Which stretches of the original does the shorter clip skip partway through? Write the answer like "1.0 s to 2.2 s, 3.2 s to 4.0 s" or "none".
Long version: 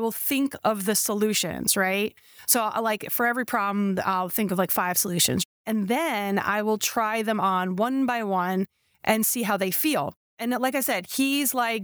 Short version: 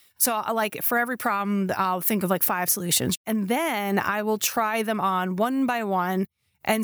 5.5 s to 5.6 s